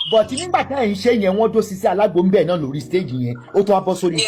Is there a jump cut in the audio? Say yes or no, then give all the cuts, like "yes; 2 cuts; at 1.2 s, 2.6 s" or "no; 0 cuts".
no; 0 cuts